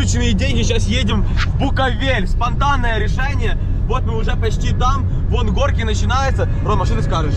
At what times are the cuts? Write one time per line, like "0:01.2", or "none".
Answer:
none